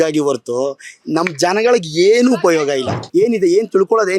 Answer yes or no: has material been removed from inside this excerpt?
yes